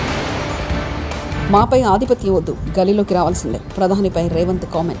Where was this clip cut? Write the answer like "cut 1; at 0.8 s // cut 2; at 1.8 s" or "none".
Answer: cut 1; at 1.4 s